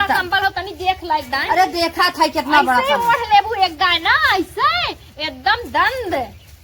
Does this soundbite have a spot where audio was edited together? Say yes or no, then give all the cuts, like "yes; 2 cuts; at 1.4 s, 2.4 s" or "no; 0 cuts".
no; 0 cuts